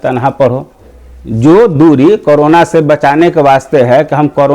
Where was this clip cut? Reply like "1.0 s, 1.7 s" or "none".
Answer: 0.9 s